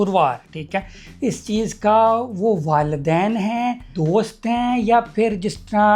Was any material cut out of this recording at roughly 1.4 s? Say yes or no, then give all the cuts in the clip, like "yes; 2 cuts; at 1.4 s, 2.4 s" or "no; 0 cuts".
no; 1 cut; at 3.9 s